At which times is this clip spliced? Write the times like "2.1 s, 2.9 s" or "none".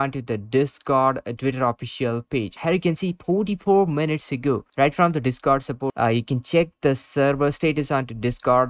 2.6 s, 5.9 s